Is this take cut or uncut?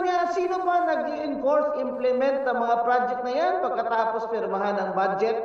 uncut